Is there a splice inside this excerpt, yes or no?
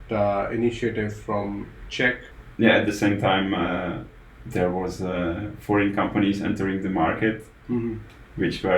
yes